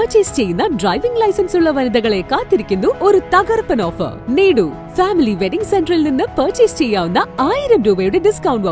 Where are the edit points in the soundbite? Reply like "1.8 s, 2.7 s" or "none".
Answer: 3.0 s, 4.2 s